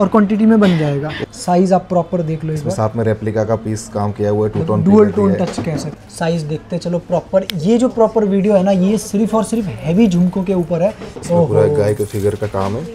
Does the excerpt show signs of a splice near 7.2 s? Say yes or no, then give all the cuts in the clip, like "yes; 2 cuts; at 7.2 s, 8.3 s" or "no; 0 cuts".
no; 3 cuts; at 1.2 s, 5.9 s, 11.1 s